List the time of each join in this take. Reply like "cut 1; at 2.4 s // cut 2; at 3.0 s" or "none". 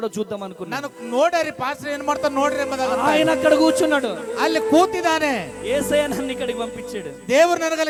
none